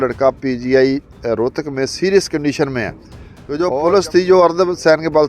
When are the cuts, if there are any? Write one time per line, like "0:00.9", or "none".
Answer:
0:03.6